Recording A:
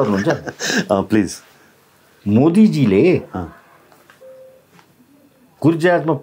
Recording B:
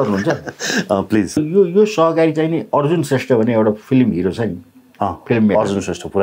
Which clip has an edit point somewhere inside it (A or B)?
B